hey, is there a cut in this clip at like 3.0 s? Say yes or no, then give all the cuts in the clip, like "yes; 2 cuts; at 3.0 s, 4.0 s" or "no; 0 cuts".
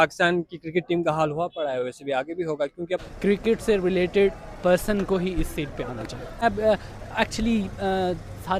yes; 2 cuts; at 3.0 s, 6.4 s